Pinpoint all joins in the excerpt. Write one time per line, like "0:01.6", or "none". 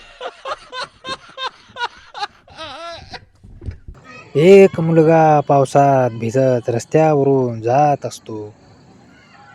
0:03.9